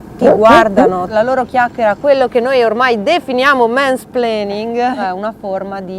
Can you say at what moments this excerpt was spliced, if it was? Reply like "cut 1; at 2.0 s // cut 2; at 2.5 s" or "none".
cut 1; at 1.1 s // cut 2; at 5.0 s

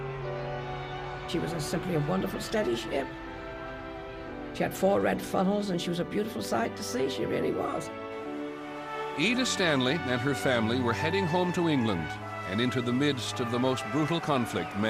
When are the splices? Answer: cut 1; at 9.5 s

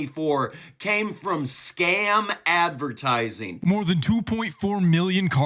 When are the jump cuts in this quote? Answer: cut 1; at 3.5 s

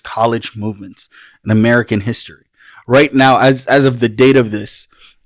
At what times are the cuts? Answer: none

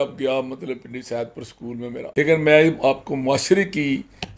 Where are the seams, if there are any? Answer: cut 1; at 2.1 s

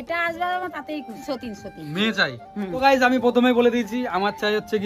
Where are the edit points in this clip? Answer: cut 1; at 1.2 s

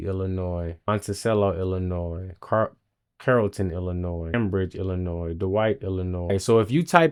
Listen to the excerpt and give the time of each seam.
none

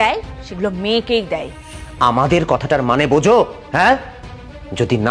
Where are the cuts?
cut 1; at 1.6 s

